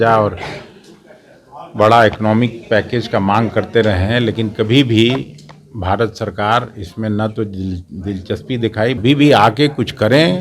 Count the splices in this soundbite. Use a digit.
1